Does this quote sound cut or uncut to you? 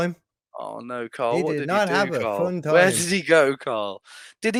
uncut